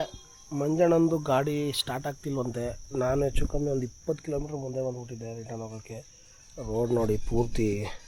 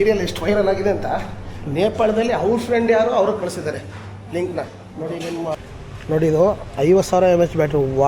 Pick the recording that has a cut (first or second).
second